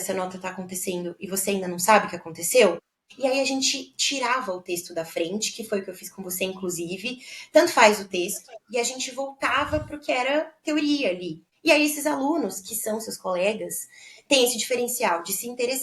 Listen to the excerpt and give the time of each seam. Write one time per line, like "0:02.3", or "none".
none